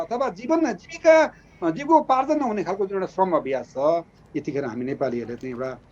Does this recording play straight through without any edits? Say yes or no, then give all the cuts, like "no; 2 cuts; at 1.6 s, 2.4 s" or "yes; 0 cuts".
no; 1 cut; at 4.2 s